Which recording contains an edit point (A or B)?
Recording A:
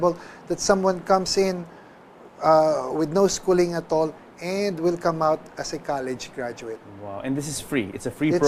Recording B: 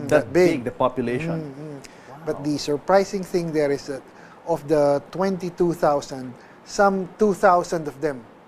B